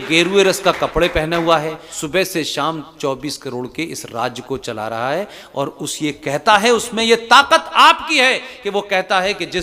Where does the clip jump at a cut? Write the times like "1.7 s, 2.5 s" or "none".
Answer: 1.9 s